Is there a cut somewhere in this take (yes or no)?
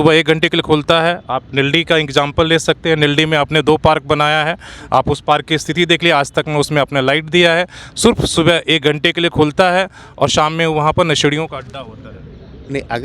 no